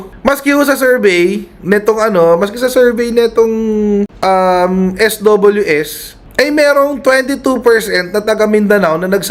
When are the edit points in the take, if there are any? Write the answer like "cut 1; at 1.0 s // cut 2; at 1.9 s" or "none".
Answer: none